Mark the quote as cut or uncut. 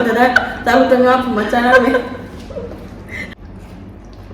cut